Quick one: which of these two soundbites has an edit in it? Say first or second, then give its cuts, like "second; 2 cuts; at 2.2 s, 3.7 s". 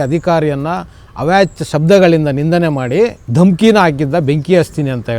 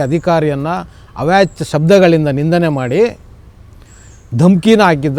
first; 1 cut; at 3.2 s